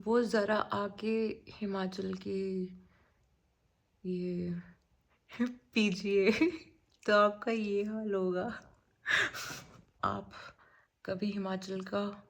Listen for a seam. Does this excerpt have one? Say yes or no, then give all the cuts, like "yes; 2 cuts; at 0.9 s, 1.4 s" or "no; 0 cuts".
yes; 1 cut; at 9.9 s